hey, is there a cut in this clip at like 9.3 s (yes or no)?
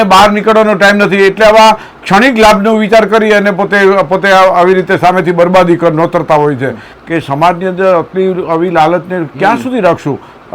no